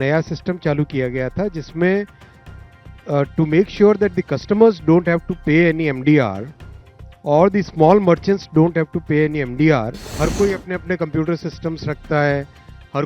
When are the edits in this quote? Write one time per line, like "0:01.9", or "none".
0:10.0